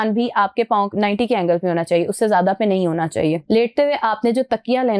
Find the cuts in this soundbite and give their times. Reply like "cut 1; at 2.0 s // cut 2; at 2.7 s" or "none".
cut 1; at 0.9 s // cut 2; at 3.4 s